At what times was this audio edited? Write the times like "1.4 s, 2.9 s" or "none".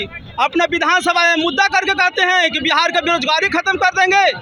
none